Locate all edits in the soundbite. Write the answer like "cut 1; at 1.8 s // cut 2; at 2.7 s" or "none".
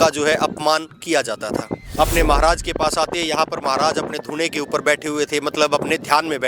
cut 1; at 1.8 s